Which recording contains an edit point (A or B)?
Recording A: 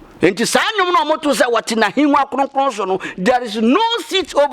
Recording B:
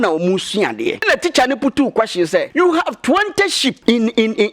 B